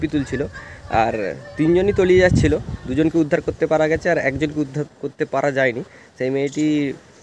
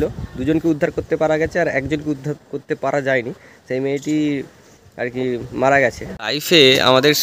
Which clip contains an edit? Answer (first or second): second